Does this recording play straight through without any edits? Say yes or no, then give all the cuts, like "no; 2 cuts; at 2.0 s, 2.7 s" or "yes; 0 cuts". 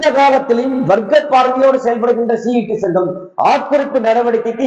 yes; 0 cuts